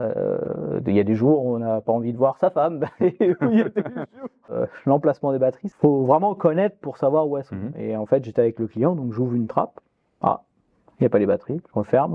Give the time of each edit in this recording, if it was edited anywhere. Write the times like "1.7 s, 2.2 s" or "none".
4.5 s, 5.7 s